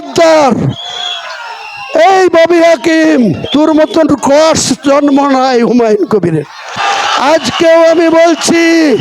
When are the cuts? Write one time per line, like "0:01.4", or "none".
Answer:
0:06.8